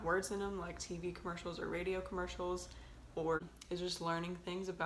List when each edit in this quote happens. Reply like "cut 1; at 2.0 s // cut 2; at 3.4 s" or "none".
cut 1; at 3.4 s